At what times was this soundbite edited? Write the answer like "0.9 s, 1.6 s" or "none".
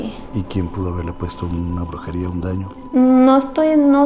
none